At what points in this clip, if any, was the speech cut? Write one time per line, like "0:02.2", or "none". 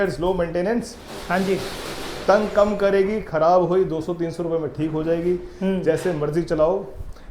none